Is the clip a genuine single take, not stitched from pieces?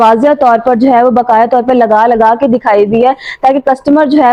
yes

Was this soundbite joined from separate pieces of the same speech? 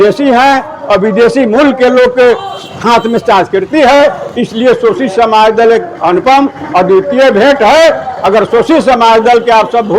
no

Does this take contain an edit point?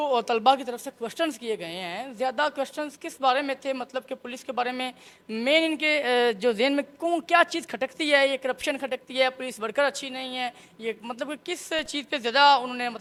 no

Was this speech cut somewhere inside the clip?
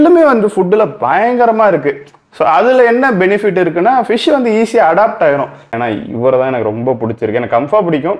yes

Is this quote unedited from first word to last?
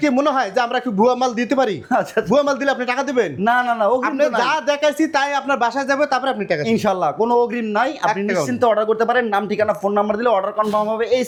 yes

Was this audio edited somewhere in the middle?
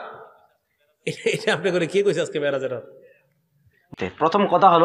yes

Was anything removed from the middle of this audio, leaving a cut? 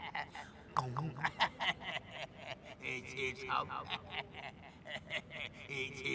no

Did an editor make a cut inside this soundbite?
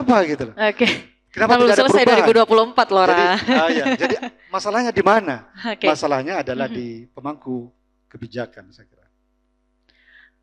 no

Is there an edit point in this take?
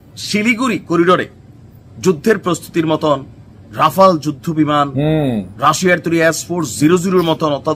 no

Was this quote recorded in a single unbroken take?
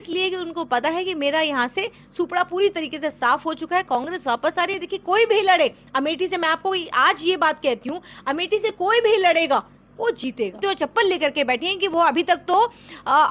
no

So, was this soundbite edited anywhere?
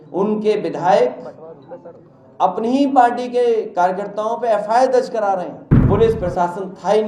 yes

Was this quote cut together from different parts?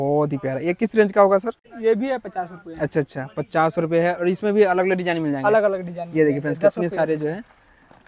no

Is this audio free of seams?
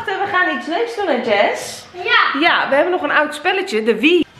yes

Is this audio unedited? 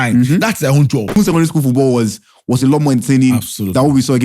no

